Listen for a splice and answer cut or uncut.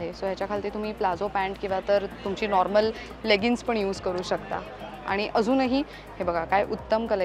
uncut